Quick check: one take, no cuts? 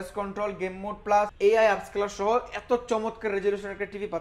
no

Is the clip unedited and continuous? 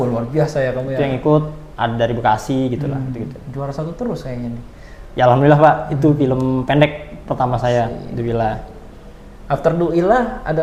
yes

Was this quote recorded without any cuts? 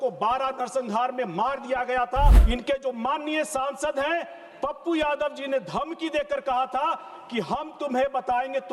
no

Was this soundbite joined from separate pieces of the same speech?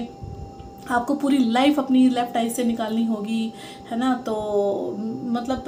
no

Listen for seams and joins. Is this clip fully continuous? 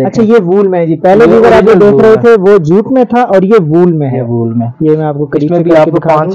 yes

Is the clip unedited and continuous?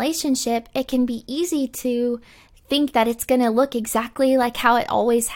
yes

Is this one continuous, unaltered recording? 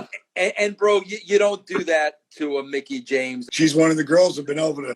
no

